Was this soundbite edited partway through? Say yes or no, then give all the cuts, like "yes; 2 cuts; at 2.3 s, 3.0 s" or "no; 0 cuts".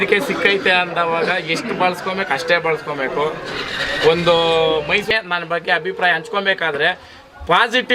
yes; 1 cut; at 5.1 s